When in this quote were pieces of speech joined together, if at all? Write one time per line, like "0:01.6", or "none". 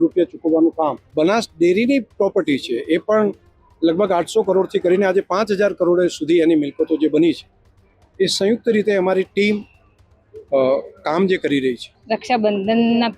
0:01.0
0:11.9